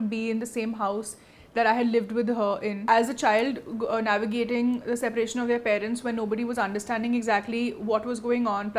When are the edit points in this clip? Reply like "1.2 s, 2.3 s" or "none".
2.8 s

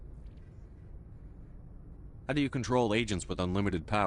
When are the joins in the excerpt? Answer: 2.2 s

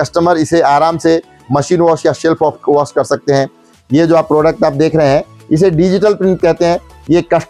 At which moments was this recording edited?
3.7 s

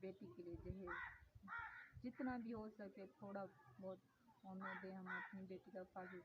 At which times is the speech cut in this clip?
none

